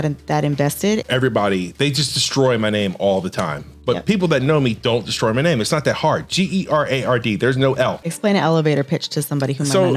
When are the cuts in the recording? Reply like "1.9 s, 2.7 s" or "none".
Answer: 1.0 s, 8.1 s

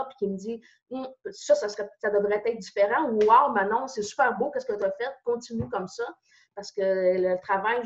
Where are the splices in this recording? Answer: none

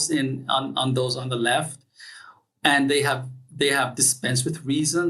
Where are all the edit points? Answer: none

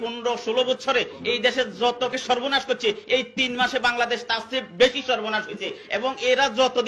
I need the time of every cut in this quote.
2.1 s

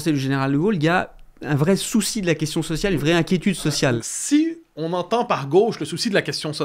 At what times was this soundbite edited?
4.0 s

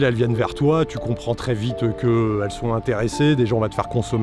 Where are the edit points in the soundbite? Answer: none

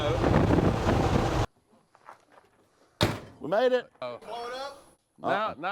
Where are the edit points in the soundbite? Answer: 1.4 s, 4.0 s

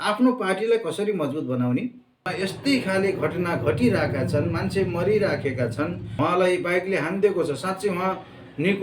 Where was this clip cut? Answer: 2.3 s

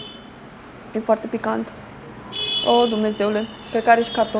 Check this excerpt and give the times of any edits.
none

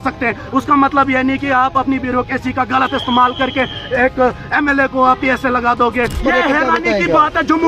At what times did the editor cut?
6.2 s

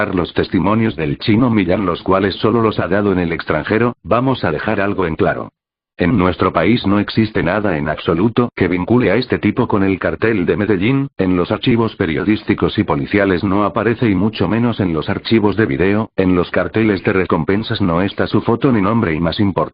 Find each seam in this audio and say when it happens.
none

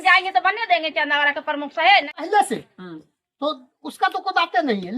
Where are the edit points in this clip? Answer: 2.2 s

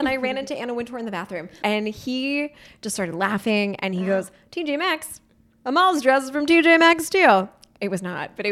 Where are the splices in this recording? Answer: 1.5 s

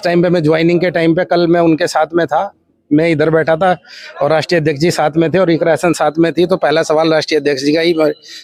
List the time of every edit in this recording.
none

